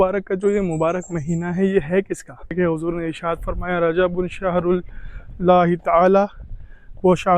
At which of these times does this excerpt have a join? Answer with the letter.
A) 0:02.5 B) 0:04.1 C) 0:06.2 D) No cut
A